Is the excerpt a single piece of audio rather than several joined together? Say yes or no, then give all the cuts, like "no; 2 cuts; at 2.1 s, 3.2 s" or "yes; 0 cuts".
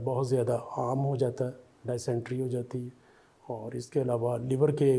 yes; 0 cuts